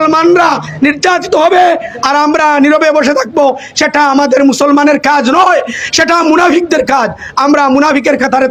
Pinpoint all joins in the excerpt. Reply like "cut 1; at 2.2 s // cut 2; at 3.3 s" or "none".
none